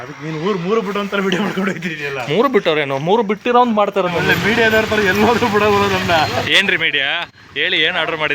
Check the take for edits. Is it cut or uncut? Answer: cut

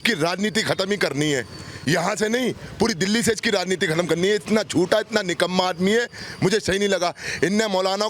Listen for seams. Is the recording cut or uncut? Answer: uncut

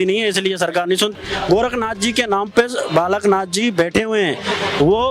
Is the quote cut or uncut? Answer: cut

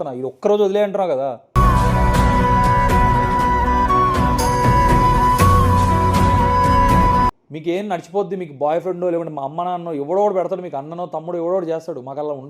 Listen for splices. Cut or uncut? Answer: cut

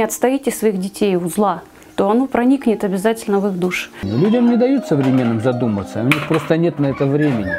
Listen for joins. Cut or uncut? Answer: cut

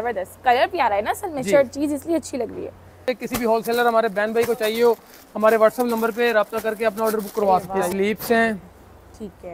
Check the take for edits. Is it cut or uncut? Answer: cut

